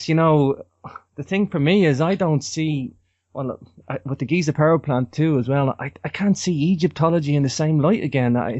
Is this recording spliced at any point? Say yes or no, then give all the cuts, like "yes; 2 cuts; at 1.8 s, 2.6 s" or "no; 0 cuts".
yes; 1 cut; at 5.1 s